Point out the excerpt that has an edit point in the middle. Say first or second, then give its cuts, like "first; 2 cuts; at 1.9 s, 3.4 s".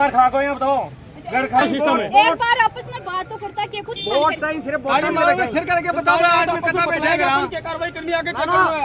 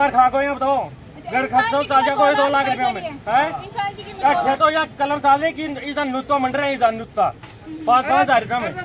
first; 1 cut; at 1.6 s